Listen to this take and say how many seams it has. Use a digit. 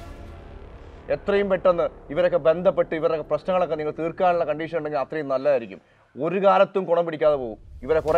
0